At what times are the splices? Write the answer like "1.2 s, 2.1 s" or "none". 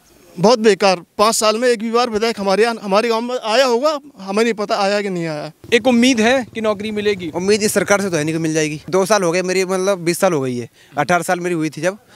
5.6 s, 8.9 s